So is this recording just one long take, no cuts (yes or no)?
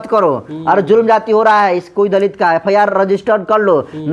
yes